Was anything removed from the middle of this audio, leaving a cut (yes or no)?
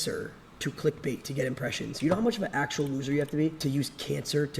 yes